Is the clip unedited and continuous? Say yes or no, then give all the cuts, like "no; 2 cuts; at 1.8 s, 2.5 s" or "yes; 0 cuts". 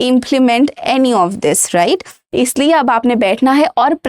yes; 0 cuts